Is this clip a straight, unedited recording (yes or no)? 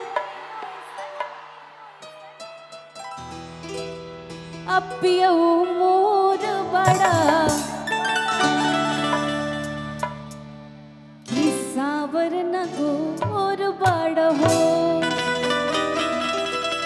yes